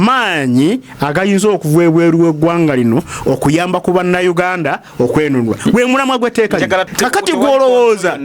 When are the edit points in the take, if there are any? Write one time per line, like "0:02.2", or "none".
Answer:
0:06.9

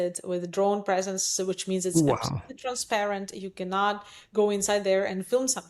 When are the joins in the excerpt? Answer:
none

